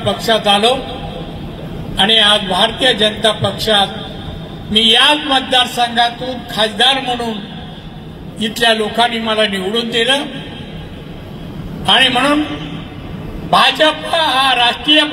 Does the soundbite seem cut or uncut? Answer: uncut